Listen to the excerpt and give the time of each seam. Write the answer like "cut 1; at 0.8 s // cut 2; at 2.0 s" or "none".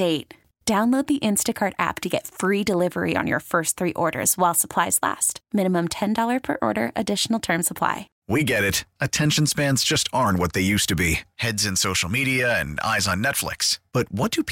cut 1; at 8.1 s

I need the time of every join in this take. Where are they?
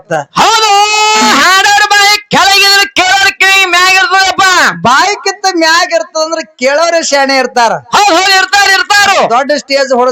none

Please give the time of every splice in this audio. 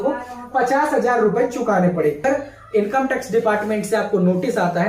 cut 1; at 2.2 s

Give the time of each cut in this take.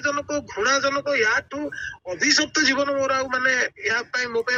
none

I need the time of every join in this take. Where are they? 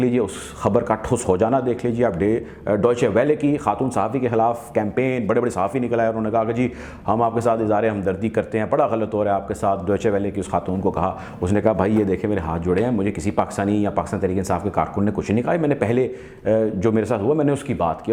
none

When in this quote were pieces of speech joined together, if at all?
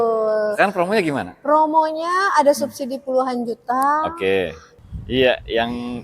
cut 1; at 4.8 s

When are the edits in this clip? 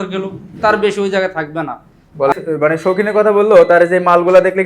cut 1; at 2.4 s

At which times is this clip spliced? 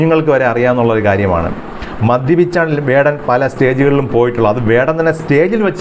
none

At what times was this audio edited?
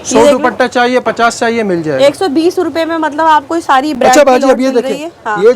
none

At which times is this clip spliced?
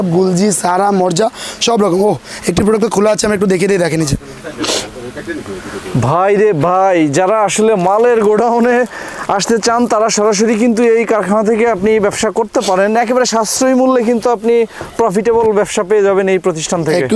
none

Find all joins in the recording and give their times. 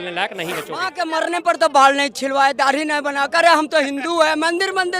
cut 1; at 0.9 s

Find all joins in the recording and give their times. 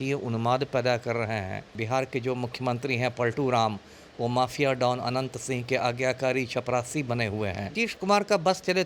cut 1; at 1.8 s // cut 2; at 7.7 s

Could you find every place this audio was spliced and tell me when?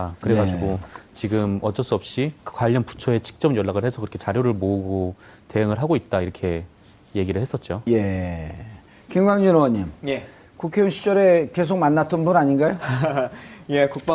none

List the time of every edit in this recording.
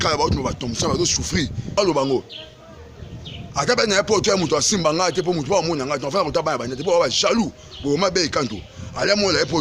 cut 1; at 1.8 s

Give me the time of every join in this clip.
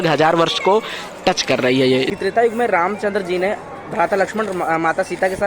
cut 1; at 2.1 s

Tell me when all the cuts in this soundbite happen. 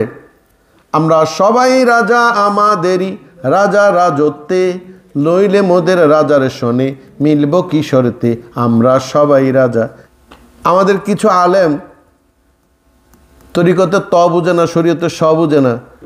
cut 1; at 10.0 s

